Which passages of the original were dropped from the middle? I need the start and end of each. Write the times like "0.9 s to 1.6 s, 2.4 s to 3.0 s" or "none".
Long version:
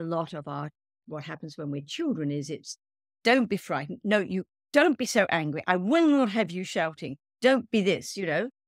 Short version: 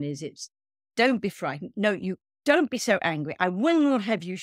none